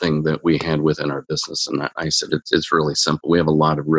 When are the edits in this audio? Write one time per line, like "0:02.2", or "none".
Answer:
none